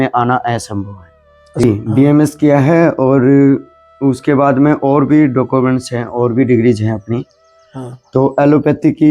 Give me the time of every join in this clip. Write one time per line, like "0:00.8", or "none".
0:01.6